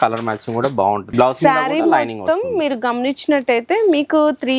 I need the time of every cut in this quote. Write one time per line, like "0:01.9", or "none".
0:01.1